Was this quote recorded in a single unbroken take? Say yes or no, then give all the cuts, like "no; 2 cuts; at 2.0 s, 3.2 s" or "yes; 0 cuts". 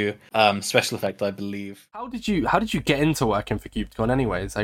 no; 1 cut; at 2.0 s